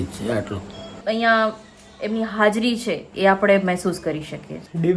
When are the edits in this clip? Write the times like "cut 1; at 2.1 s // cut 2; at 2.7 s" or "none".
cut 1; at 1.0 s